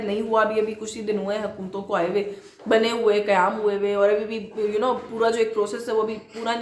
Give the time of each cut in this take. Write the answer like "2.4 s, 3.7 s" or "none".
none

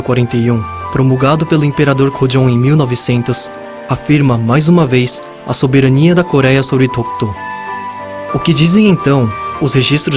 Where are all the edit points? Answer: 1.7 s

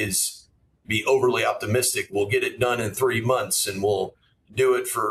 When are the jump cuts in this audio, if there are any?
none

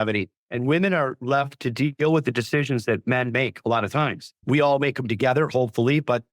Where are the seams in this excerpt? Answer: 4.3 s

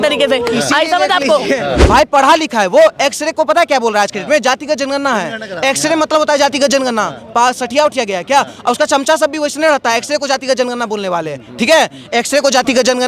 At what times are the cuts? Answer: 1.8 s

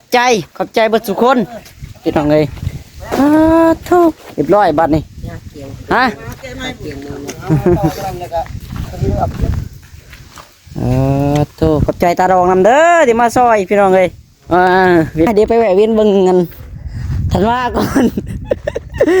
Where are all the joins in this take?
15.3 s

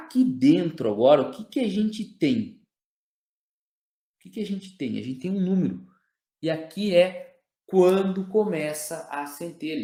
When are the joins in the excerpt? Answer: none

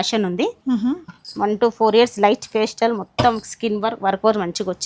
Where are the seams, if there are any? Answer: 1.0 s

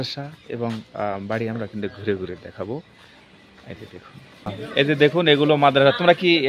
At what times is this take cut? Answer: 4.6 s

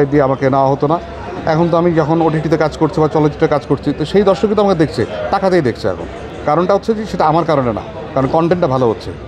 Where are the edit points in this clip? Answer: none

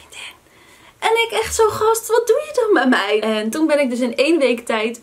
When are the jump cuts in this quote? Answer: 3.2 s

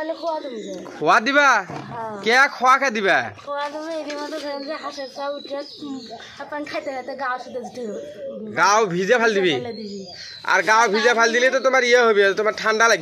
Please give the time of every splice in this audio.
none

